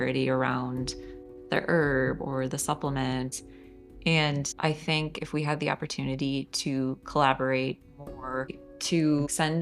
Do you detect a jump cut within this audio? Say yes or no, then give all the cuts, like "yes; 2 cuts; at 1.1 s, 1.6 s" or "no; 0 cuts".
yes; 3 cuts; at 3.3 s, 4.5 s, 8.6 s